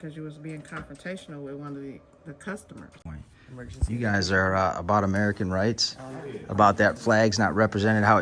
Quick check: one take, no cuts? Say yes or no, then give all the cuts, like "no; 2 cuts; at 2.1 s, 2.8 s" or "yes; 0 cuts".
no; 1 cut; at 3.0 s